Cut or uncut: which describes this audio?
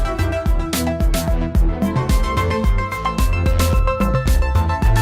uncut